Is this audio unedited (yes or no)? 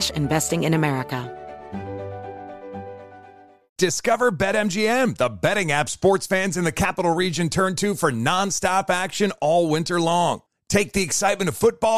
no